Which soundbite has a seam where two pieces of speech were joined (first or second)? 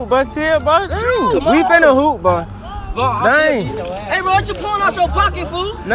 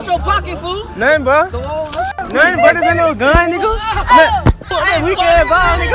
second